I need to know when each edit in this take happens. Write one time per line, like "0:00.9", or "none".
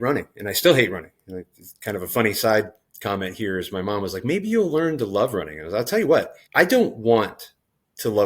0:06.4